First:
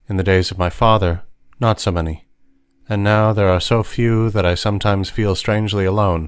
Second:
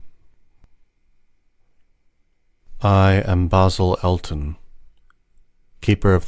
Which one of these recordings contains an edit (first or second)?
first